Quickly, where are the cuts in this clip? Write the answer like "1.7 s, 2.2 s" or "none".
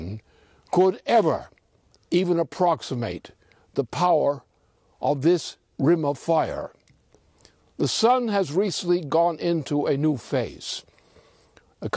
10.0 s